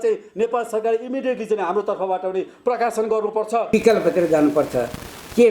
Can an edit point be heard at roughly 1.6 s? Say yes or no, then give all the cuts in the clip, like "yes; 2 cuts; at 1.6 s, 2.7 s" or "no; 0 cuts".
no; 1 cut; at 3.7 s